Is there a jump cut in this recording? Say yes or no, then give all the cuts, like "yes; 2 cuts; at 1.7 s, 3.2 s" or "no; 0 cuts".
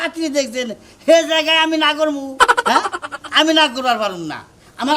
no; 0 cuts